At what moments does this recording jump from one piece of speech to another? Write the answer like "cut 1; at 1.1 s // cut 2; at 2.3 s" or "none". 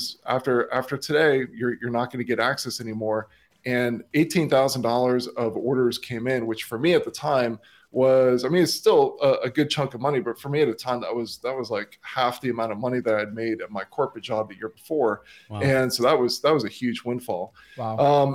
none